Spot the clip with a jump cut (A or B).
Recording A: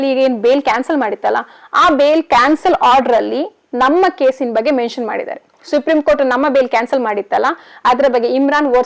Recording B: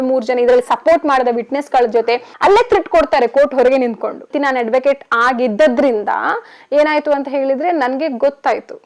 B